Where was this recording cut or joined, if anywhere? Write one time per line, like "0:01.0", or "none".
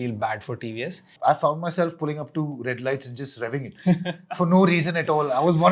0:01.0